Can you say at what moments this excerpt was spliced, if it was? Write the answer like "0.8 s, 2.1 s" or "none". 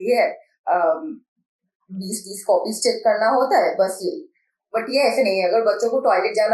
none